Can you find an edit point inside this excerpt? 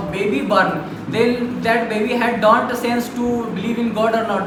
no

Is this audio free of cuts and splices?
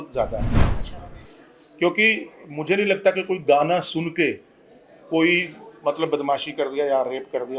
yes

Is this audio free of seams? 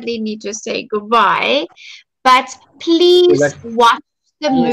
yes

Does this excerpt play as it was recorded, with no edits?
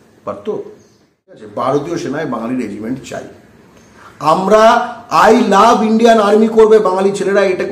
no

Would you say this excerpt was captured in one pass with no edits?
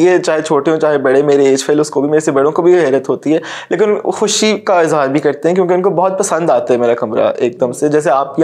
yes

